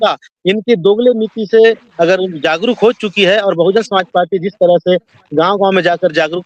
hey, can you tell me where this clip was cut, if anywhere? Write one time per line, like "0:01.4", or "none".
none